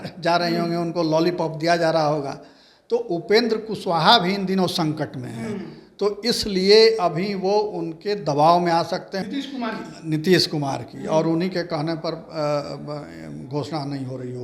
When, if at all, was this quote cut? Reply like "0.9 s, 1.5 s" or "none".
9.2 s